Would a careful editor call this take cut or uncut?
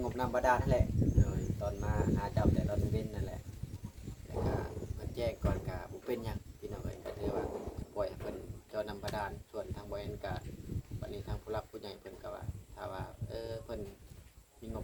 uncut